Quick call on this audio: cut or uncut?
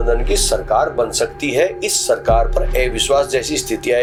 uncut